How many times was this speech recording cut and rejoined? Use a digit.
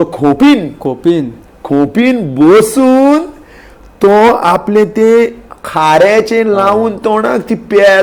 0